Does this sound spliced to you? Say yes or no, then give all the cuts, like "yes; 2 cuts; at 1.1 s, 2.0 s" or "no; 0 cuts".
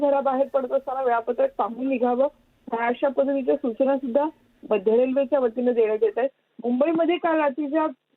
yes; 1 cut; at 3.0 s